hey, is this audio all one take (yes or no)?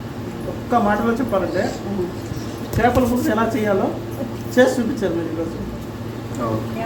yes